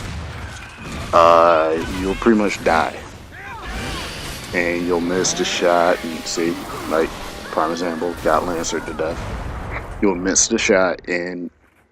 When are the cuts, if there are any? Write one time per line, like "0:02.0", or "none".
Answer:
0:02.6